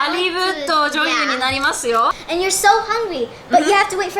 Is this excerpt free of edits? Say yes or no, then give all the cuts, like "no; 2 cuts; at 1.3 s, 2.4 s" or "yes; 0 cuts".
no; 1 cut; at 2.1 s